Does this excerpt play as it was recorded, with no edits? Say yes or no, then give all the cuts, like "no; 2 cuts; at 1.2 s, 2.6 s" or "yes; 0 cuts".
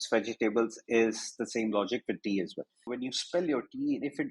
no; 1 cut; at 2.9 s